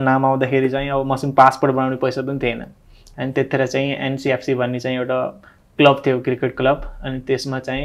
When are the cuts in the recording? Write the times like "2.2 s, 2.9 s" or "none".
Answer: none